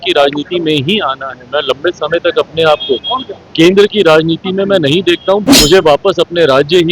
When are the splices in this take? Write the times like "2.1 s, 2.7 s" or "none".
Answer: 5.4 s

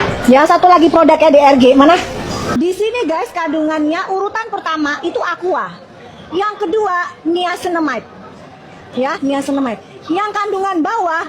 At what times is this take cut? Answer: 2.5 s

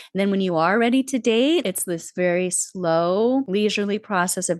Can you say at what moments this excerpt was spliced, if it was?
1.6 s, 3.5 s

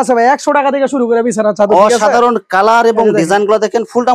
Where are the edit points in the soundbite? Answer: none

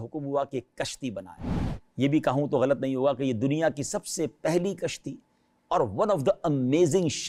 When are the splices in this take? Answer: none

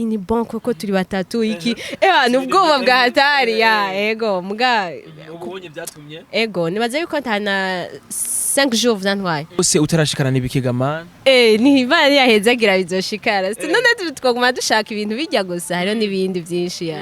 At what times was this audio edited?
9.6 s

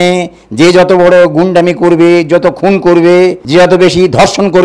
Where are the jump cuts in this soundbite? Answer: 3.4 s

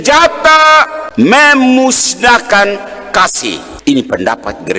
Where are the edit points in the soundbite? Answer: 1.0 s, 3.7 s

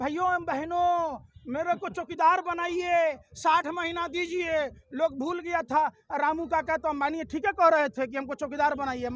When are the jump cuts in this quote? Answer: none

